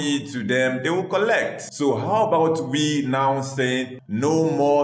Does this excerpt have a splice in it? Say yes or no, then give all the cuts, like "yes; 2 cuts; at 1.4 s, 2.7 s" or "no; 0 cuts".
yes; 2 cuts; at 1.6 s, 4.0 s